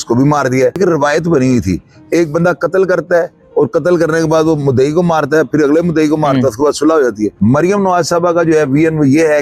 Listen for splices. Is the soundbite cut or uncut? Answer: cut